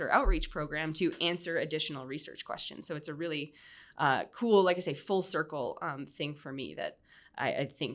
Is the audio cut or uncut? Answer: uncut